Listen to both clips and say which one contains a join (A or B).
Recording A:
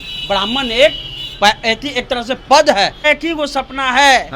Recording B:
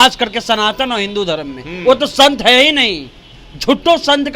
A